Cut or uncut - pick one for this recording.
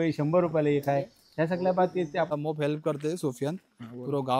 cut